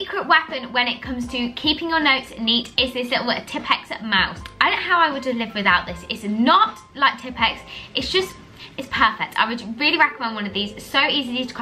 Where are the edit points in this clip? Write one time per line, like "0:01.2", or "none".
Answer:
none